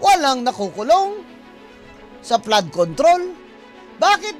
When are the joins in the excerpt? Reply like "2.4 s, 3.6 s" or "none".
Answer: none